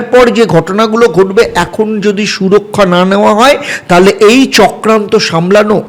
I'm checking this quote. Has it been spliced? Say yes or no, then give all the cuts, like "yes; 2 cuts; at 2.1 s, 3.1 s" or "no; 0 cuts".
no; 0 cuts